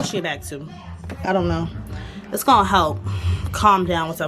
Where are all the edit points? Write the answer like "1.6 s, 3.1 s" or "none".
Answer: 1.2 s